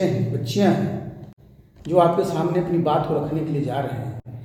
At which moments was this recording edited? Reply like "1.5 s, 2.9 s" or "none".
none